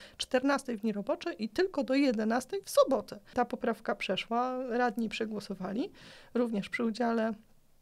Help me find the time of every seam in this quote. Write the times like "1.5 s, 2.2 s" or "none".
3.3 s